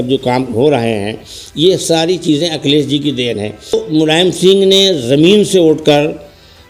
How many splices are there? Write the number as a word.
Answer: one